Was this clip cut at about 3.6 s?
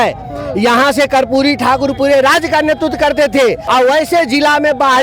yes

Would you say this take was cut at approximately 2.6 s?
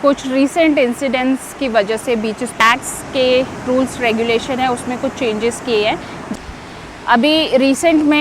yes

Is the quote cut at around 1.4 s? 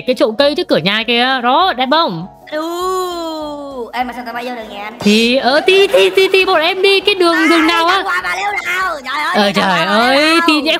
no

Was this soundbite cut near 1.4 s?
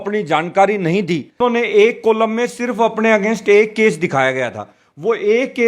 yes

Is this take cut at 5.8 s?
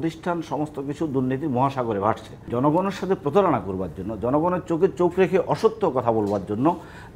no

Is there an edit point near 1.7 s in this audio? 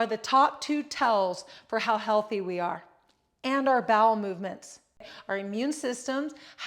no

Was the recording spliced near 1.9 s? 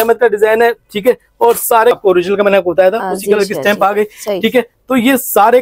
yes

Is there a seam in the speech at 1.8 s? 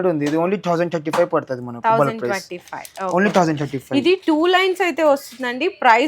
no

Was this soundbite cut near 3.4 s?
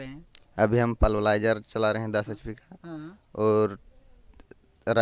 no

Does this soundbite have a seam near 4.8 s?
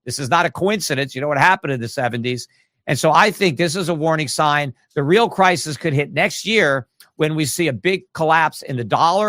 no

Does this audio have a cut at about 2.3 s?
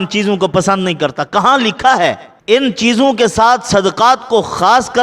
yes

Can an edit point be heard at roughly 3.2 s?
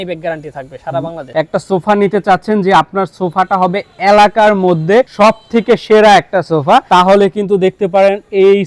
no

